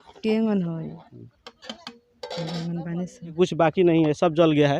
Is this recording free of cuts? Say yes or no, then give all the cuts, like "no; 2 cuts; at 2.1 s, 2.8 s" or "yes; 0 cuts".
no; 1 cut; at 3.3 s